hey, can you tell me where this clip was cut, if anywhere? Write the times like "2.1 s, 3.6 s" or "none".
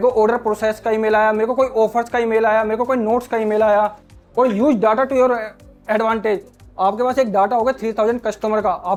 none